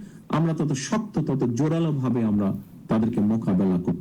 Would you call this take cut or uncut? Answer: uncut